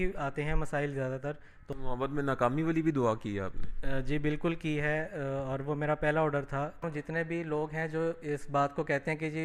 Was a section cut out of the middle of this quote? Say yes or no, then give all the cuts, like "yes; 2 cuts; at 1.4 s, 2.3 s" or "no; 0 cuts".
yes; 2 cuts; at 1.5 s, 6.8 s